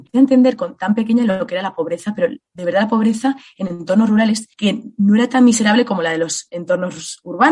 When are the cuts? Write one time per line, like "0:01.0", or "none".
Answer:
0:04.5